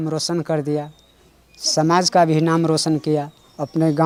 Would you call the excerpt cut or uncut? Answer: uncut